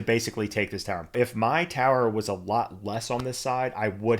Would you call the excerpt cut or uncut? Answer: cut